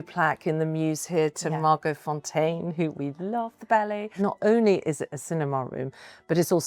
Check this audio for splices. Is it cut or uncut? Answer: cut